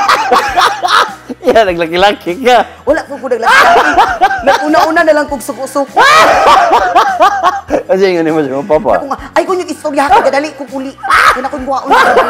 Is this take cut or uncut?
uncut